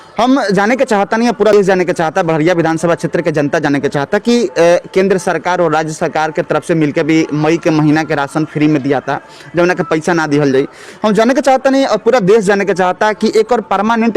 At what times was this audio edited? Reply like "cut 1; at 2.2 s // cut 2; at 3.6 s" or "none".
cut 1; at 1.5 s